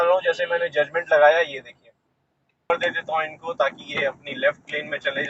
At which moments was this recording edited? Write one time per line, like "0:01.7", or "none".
0:02.7

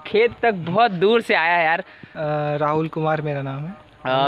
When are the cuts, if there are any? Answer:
none

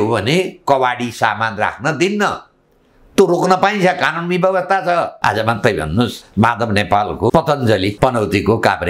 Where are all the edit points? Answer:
0:05.1
0:06.2
0:07.3
0:08.0

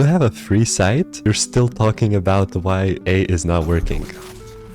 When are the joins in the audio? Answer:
0:01.2
0:03.0

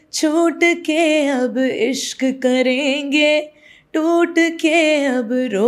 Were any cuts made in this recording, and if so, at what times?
none

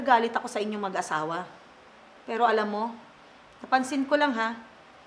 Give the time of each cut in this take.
none

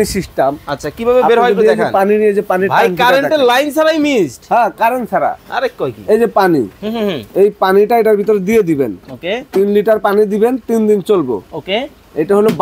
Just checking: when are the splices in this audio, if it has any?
none

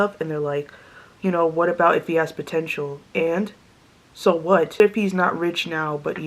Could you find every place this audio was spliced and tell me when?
0:04.8

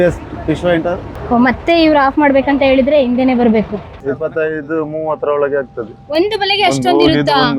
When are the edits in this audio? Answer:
0:04.0

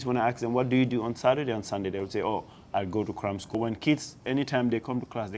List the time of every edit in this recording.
0:03.6

